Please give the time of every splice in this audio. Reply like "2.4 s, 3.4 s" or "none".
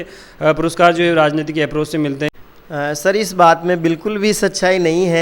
none

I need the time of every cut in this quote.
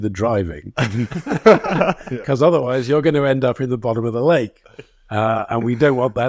none

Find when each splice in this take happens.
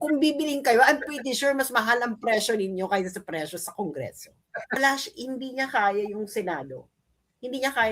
4.8 s

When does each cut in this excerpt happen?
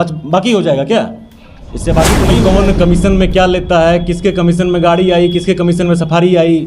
2.3 s

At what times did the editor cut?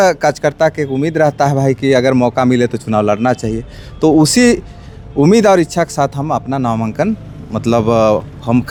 none

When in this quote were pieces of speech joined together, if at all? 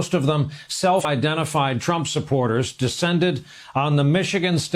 1.1 s

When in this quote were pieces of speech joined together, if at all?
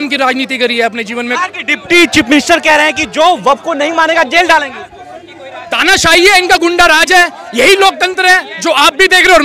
none

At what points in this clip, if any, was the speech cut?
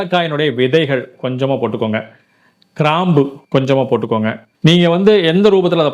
4.4 s

